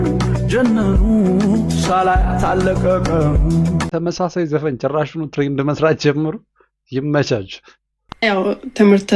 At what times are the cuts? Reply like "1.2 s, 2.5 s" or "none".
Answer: none